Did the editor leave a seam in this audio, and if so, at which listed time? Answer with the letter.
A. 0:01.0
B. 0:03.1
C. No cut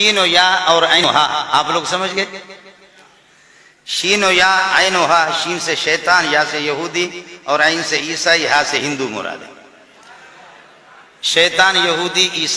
A